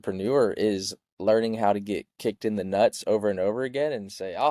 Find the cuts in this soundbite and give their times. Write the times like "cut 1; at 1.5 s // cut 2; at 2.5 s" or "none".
none